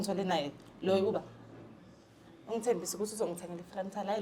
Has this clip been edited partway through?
no; 0 cuts

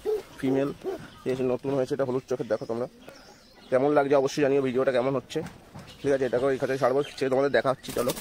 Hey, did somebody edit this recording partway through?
no; 0 cuts

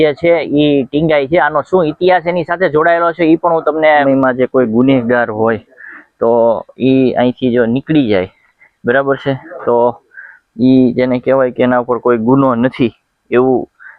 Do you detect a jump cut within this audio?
yes; 1 cut; at 4.0 s

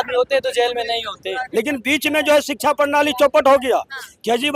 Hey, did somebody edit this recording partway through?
yes; 1 cut; at 1.4 s

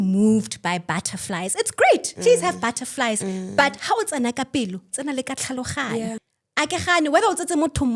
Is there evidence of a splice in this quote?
yes; 1 cut; at 6.2 s

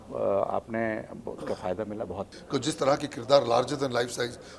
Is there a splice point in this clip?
yes; 1 cut; at 2.3 s

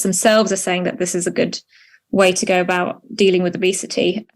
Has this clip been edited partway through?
no; 0 cuts

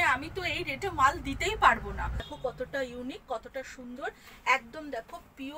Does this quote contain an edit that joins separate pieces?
yes; 1 cut; at 2.3 s

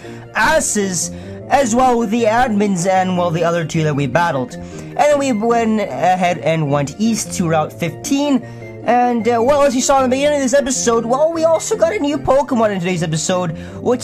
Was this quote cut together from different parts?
yes; 1 cut; at 5.4 s

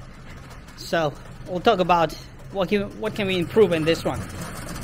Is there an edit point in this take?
no; 0 cuts

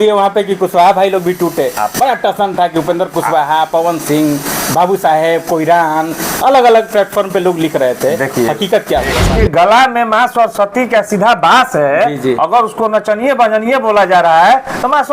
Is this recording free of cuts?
no; 1 cut; at 9.3 s

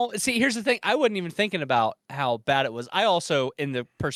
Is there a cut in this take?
no; 0 cuts

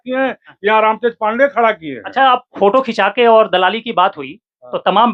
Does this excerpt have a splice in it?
no; 0 cuts

